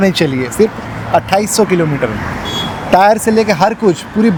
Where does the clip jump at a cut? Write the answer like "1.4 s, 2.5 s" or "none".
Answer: none